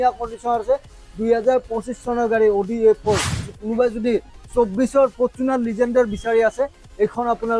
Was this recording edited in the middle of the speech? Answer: yes; 1 cut; at 3.5 s

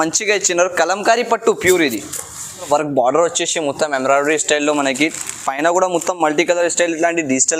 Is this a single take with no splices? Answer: no; 1 cut; at 2.7 s

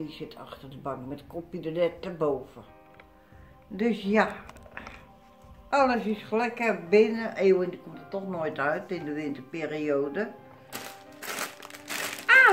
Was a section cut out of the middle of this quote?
yes; 1 cut; at 10.7 s

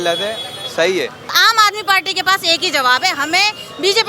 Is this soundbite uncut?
no; 1 cut; at 1.3 s

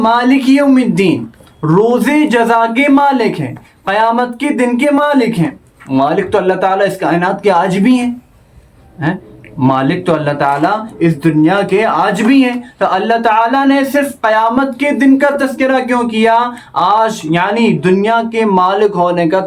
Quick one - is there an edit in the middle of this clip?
no; 0 cuts

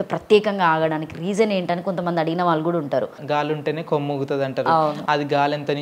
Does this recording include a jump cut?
yes; 1 cut; at 3.2 s

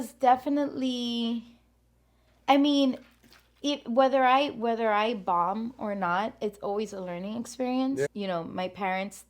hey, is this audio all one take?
no; 1 cut; at 8.1 s

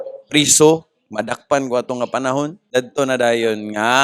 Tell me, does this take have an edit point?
yes; 1 cut; at 2.6 s

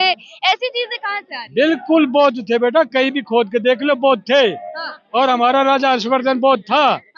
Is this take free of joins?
yes; 0 cuts

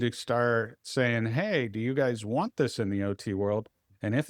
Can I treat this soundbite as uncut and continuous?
yes; 0 cuts

